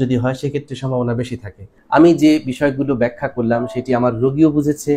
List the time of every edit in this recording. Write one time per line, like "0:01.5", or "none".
0:01.7